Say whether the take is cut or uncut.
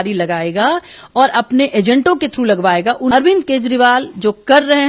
cut